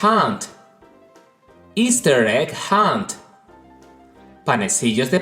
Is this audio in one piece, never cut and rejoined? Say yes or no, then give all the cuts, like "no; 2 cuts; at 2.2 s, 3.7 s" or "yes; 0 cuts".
yes; 0 cuts